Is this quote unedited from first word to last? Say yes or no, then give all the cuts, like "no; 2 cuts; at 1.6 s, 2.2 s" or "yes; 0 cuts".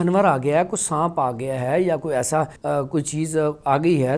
no; 1 cut; at 2.6 s